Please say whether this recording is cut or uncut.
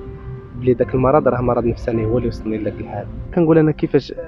cut